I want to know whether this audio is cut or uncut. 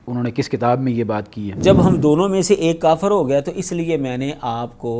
cut